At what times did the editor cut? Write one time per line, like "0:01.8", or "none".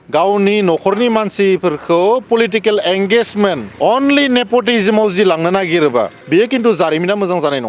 0:03.7
0:06.2